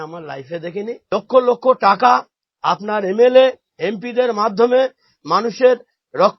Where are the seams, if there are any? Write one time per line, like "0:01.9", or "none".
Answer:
0:01.0